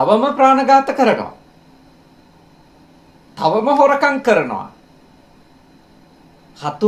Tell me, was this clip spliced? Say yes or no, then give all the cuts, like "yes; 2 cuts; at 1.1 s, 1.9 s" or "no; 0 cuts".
no; 0 cuts